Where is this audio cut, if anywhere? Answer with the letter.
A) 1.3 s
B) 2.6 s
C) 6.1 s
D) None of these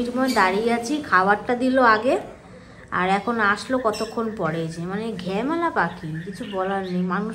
C